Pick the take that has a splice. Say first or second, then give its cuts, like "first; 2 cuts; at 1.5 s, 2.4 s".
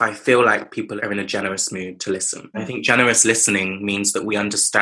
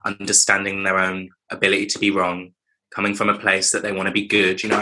first; 2 cuts; at 0.9 s, 2.6 s